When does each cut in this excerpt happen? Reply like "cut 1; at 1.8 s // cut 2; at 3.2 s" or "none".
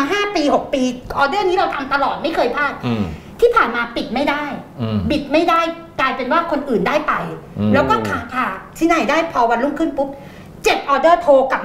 none